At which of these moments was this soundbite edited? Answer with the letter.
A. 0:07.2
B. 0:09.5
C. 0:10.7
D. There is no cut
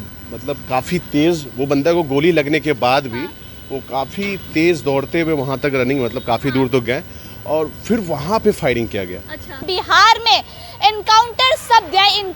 B